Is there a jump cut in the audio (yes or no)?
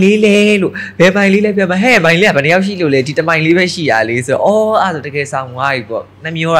no